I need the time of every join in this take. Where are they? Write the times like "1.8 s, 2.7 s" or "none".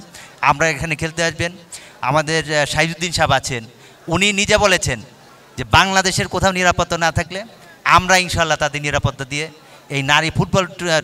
none